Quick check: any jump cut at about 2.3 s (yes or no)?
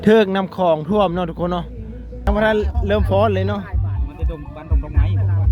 yes